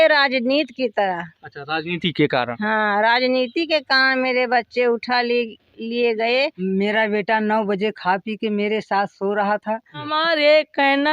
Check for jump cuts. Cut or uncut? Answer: cut